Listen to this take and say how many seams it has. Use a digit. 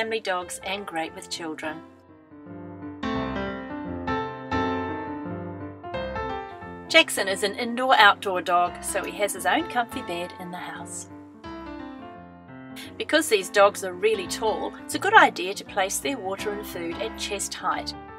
1